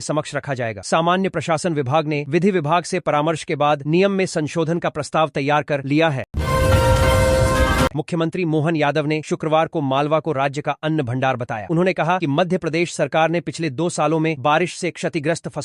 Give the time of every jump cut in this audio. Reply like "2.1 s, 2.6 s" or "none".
6.3 s, 7.9 s